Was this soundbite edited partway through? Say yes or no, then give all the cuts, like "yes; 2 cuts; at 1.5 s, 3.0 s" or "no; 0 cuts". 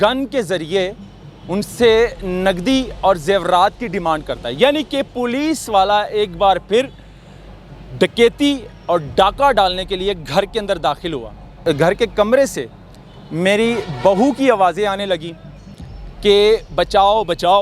yes; 1 cut; at 11.5 s